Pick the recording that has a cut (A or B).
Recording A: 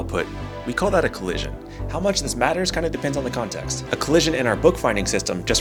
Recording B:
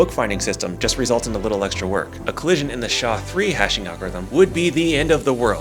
B